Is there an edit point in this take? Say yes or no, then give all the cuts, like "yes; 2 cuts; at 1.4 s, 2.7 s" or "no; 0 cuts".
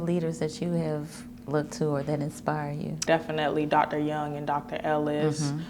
yes; 1 cut; at 3.0 s